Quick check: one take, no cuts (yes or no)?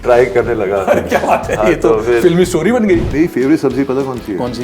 no